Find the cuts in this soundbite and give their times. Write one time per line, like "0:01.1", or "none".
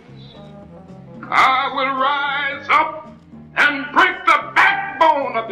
none